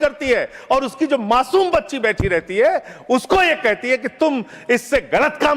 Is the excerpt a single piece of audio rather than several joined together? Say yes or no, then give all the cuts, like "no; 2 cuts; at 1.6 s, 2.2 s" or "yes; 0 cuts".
yes; 0 cuts